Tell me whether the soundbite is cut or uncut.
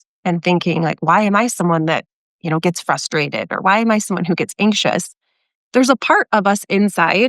uncut